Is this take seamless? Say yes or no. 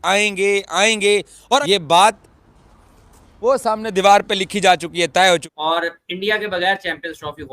no